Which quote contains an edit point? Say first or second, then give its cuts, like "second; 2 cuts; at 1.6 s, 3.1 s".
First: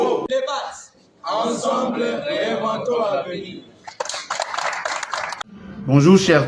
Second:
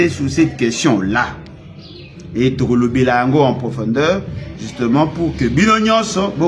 first; 1 cut; at 5.3 s